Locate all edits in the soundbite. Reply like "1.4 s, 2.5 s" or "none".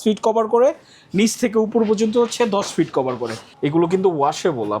3.4 s